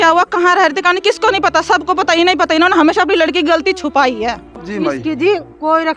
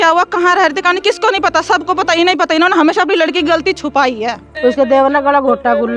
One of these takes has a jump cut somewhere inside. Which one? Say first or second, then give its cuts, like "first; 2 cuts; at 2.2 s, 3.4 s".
second; 1 cut; at 4.4 s